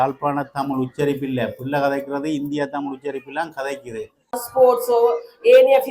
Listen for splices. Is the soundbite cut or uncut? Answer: cut